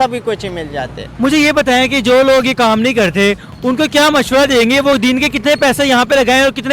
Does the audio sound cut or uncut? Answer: uncut